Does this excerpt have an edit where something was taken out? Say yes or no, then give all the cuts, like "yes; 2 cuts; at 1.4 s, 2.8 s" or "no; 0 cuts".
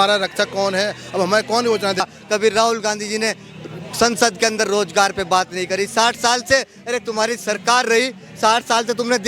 yes; 1 cut; at 2.0 s